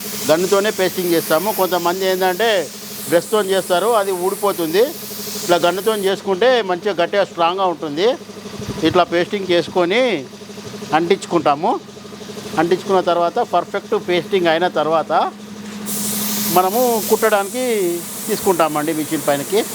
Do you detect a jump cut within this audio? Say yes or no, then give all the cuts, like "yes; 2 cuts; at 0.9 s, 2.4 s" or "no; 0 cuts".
no; 0 cuts